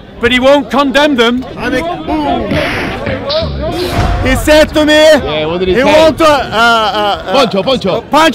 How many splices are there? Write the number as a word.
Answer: one